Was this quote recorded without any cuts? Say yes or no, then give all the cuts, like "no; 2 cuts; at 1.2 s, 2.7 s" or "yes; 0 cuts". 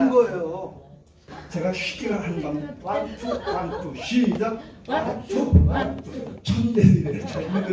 no; 1 cut; at 1.4 s